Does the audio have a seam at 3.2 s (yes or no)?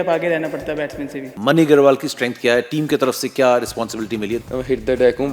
no